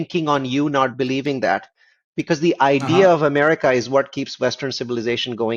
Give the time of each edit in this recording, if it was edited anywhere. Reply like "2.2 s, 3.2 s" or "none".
none